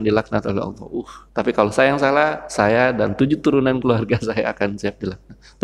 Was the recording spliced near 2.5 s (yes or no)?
no